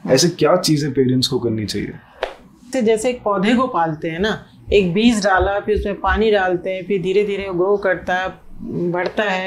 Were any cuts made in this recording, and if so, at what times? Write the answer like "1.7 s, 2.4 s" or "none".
2.6 s